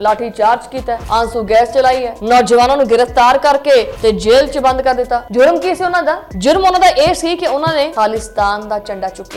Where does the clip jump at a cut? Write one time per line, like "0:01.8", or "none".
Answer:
0:03.9
0:07.9